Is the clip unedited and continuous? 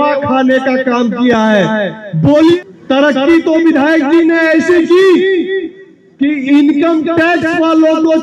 no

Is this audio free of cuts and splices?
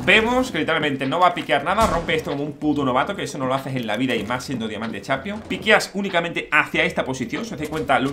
no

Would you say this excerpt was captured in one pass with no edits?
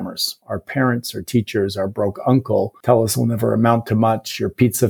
no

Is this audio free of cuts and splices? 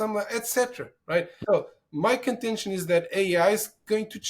no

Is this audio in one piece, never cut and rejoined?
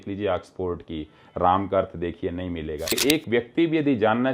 no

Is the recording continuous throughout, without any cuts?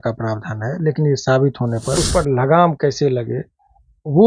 no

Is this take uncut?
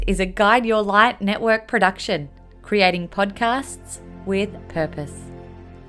yes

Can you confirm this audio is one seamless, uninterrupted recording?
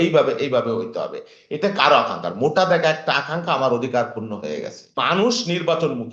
no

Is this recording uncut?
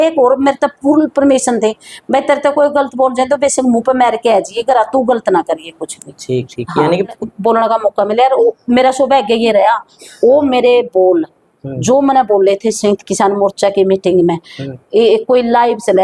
no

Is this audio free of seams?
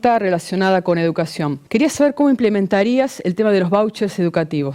no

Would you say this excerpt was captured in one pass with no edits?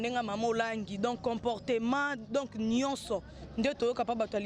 yes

